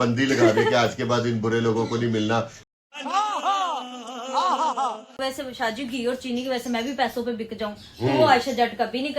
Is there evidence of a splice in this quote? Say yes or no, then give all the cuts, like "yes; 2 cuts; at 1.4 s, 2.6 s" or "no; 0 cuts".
yes; 3 cuts; at 2.7 s, 5.1 s, 8.3 s